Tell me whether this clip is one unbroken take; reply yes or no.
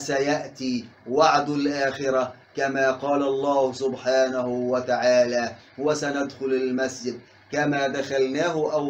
yes